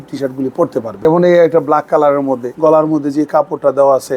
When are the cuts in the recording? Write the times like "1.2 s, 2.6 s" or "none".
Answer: 0.9 s, 2.5 s